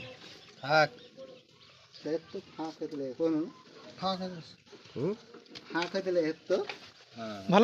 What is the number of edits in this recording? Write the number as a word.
zero